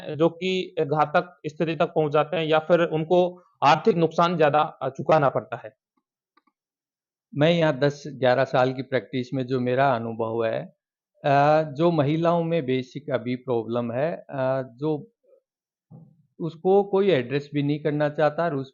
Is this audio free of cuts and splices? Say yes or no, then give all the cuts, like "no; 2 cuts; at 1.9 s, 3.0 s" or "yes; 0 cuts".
yes; 0 cuts